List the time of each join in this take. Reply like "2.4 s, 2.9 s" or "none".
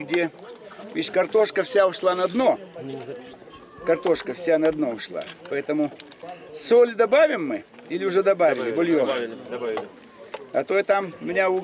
4.6 s